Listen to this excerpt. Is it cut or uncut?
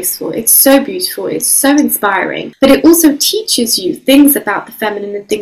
cut